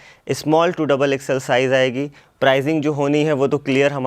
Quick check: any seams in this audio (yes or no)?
no